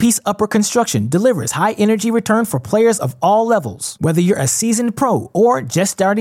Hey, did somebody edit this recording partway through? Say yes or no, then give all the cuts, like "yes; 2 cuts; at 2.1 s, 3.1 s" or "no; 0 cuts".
no; 0 cuts